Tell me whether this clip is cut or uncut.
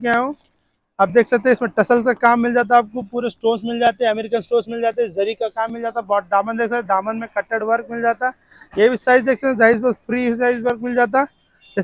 uncut